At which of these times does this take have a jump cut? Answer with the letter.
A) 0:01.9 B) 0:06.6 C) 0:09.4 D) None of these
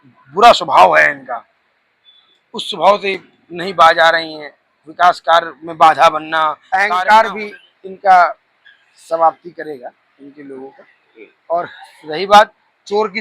B